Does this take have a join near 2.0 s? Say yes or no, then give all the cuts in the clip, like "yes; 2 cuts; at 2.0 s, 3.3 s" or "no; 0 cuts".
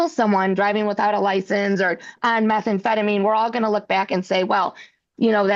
no; 0 cuts